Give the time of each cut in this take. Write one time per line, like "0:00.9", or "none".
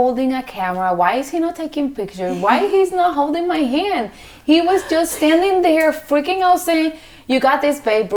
none